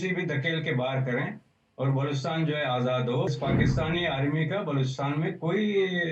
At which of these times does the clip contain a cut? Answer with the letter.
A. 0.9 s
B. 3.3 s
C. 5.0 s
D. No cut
B